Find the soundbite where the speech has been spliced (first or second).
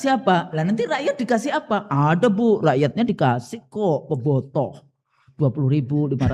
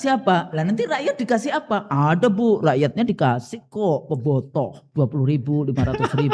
second